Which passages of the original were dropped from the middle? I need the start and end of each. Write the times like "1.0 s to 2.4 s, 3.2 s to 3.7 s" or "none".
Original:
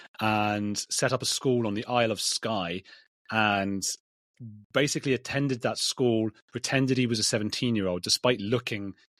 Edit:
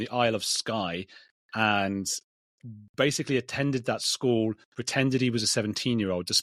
none